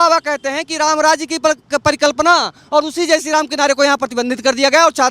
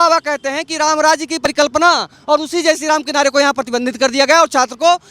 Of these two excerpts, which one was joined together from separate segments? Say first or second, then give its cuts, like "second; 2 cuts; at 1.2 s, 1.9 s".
second; 1 cut; at 1.4 s